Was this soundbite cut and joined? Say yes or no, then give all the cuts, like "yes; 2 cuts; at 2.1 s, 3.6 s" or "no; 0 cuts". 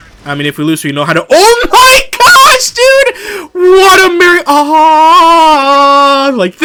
no; 0 cuts